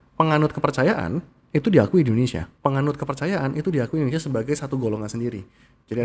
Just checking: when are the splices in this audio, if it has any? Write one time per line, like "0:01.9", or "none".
0:02.5